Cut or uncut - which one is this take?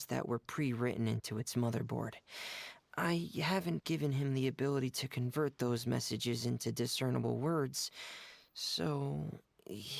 uncut